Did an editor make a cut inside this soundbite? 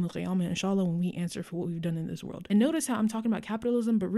yes; 1 cut; at 2.4 s

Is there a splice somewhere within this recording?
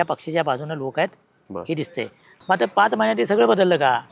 yes; 1 cut; at 2.3 s

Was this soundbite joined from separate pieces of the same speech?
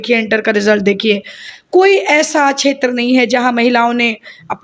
no; 0 cuts

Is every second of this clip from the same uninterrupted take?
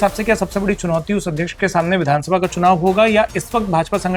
yes; 0 cuts

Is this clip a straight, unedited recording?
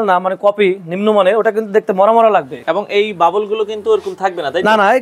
yes; 0 cuts

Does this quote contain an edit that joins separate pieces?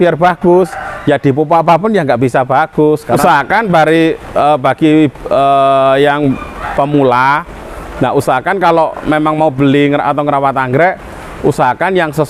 yes; 1 cut; at 3.2 s

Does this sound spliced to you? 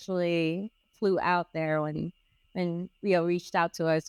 no; 0 cuts

